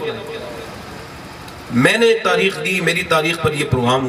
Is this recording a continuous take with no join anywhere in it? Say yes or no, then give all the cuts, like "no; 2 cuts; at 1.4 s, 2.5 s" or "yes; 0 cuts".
yes; 0 cuts